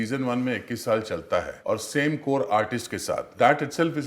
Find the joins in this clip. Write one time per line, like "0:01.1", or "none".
0:01.5
0:03.3